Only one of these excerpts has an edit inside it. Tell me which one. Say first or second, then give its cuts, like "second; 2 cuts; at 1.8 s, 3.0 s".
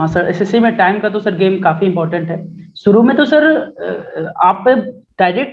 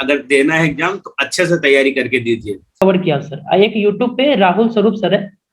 second; 1 cut; at 2.8 s